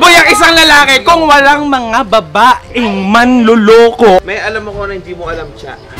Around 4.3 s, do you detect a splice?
yes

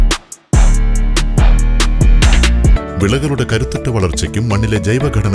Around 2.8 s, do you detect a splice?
yes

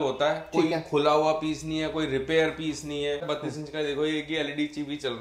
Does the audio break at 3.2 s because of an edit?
yes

